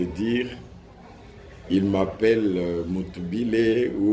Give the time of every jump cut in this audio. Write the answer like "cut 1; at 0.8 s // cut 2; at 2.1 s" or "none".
none